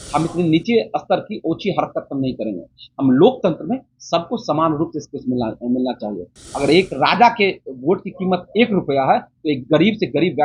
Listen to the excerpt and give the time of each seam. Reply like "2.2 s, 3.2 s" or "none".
none